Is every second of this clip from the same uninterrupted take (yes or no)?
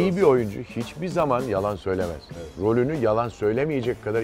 yes